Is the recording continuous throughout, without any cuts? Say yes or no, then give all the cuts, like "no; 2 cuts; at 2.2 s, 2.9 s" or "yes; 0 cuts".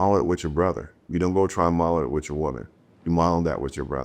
no; 1 cut; at 0.9 s